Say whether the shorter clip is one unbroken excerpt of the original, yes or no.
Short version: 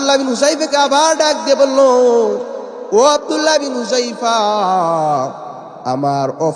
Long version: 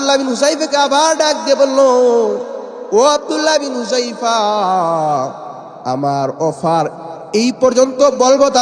yes